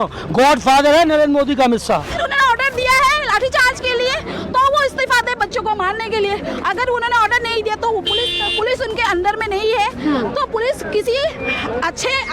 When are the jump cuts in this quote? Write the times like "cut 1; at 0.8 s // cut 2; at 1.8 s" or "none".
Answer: cut 1; at 2.1 s